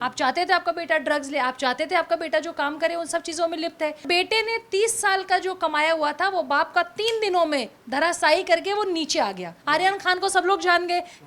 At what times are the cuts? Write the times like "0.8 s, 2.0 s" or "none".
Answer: 4.0 s, 9.5 s